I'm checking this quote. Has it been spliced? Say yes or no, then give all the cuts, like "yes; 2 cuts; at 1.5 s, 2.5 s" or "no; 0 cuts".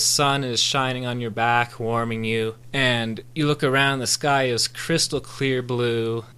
no; 0 cuts